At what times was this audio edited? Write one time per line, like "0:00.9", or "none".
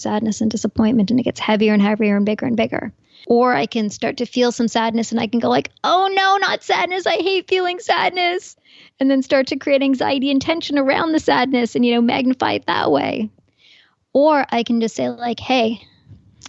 0:03.2